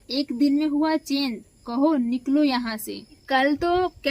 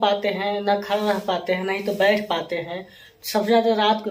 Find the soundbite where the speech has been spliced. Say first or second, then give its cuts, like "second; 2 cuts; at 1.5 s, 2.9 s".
first; 1 cut; at 3.2 s